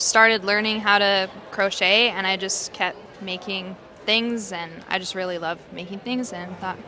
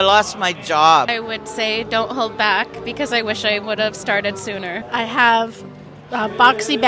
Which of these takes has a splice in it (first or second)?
second